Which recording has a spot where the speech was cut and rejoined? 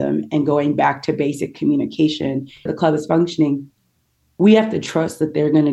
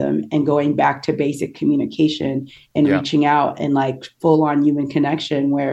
first; 1 cut; at 2.7 s

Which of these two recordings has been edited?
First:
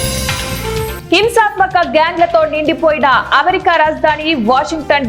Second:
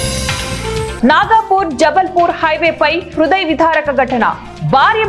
first; 1 cut; at 1.0 s

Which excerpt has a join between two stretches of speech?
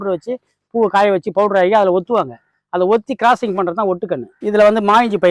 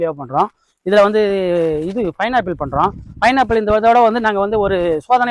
first; 1 cut; at 4.3 s

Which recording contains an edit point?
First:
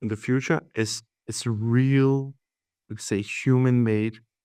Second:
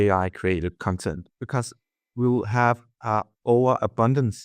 second; 1 cut; at 1.3 s

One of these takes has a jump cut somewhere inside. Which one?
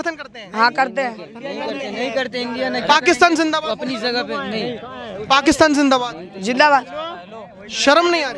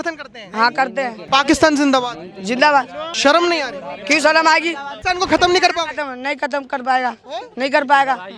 second; 3 cuts; at 1.2 s, 3.0 s, 4.9 s

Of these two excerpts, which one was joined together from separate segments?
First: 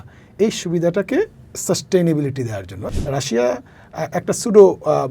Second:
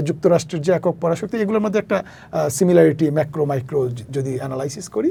first; 1 cut; at 2.8 s

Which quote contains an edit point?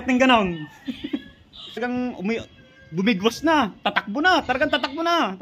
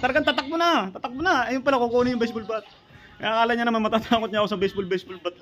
first; 1 cut; at 1.8 s

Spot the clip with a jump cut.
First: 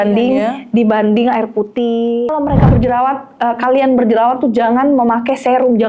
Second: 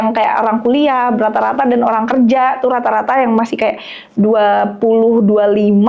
first; 1 cut; at 2.3 s

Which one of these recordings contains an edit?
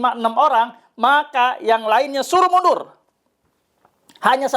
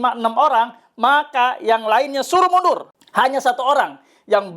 second; 1 cut; at 3.0 s

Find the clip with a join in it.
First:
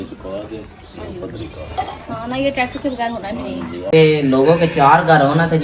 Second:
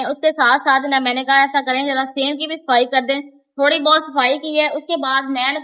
first; 1 cut; at 3.8 s

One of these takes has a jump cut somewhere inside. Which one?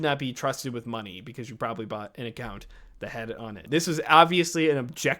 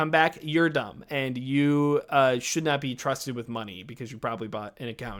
first; 1 cut; at 3.6 s

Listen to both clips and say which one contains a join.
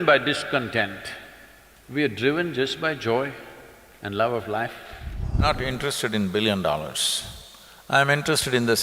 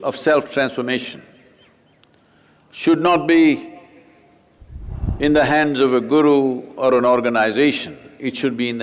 first; 1 cut; at 5.4 s

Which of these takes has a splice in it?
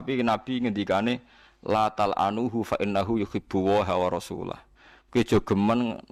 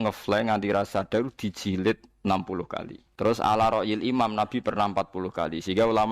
second; 1 cut; at 3.0 s

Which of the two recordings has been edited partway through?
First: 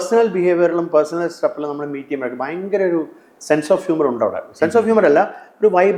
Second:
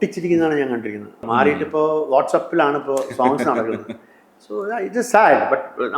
second; 1 cut; at 1.2 s

